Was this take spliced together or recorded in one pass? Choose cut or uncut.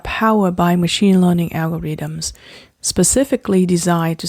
uncut